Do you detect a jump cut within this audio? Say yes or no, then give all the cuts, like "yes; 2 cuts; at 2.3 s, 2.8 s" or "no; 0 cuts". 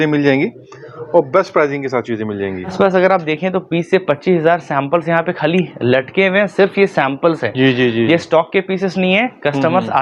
yes; 1 cut; at 2.7 s